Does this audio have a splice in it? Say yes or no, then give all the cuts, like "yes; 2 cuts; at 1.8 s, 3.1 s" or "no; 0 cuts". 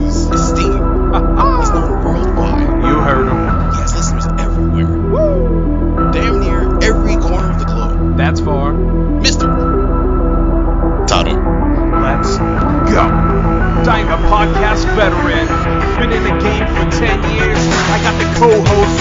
no; 0 cuts